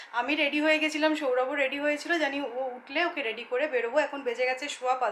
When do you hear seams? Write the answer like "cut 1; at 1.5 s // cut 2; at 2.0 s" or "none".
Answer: none